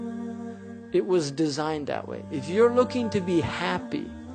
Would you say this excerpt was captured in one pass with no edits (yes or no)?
yes